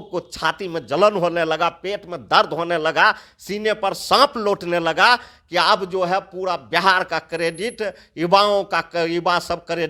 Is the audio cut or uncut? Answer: uncut